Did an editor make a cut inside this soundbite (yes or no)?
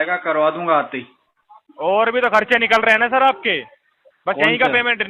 no